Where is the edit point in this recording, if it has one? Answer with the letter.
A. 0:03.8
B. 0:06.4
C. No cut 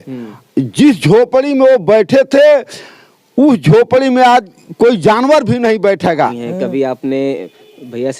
B